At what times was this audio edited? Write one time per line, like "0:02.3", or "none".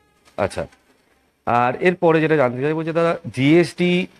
none

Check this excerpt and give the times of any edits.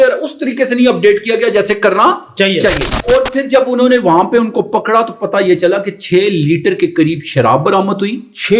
0:02.9

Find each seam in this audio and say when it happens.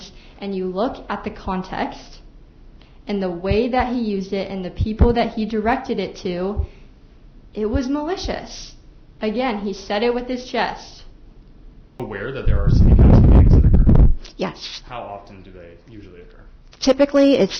0:11.9

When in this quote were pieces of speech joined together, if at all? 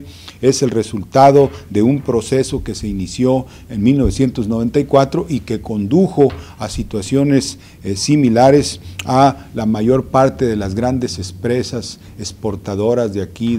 0:09.5

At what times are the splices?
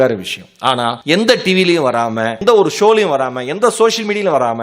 0:01.0
0:02.4

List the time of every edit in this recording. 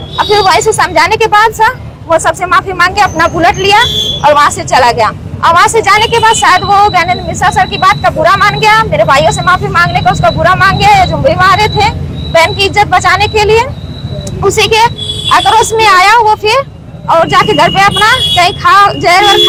none

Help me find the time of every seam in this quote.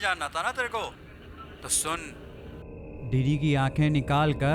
0:02.3

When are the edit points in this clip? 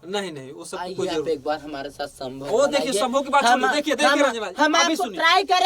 0:01.2

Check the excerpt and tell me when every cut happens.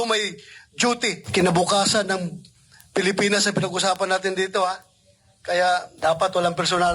0:01.2
0:05.9

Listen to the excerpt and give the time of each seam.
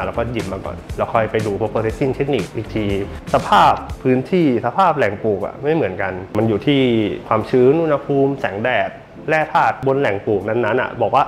0:03.2
0:06.2
0:07.2
0:09.8

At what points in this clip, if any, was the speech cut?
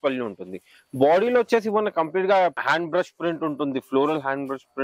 0:02.6

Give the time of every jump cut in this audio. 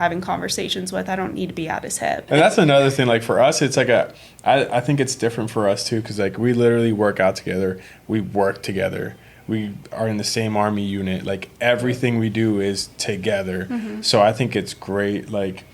0:02.3

